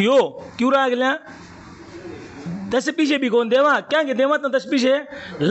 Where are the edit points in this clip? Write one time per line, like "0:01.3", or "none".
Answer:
none